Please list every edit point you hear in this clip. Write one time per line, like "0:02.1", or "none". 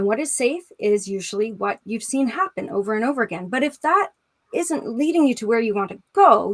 none